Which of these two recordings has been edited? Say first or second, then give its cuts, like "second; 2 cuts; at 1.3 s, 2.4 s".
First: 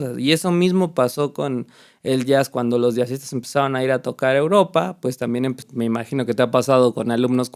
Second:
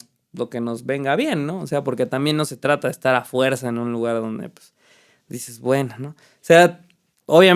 first; 1 cut; at 5.6 s